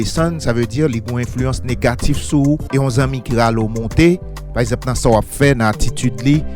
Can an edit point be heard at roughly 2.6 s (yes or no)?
yes